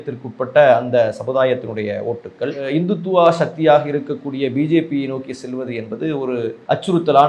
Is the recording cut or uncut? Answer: uncut